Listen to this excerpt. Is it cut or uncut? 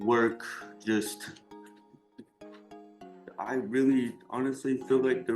cut